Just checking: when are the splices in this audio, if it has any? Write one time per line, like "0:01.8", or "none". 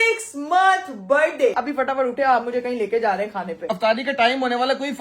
0:01.6
0:03.7